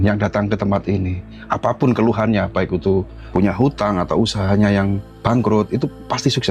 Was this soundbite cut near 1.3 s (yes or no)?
no